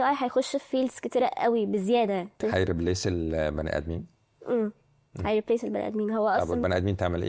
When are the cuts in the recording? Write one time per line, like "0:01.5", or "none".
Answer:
none